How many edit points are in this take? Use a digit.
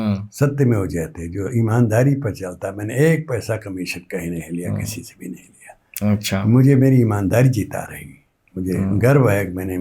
0